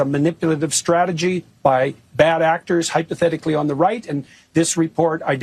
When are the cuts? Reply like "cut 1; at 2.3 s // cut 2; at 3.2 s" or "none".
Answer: cut 1; at 1.5 s